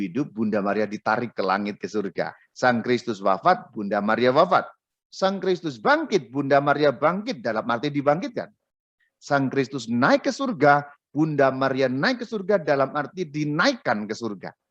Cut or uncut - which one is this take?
cut